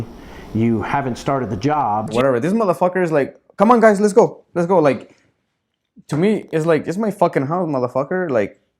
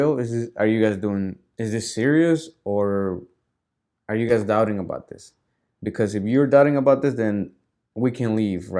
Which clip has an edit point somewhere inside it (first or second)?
first